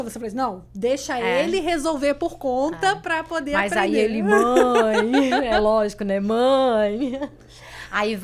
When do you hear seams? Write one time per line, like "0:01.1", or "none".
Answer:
none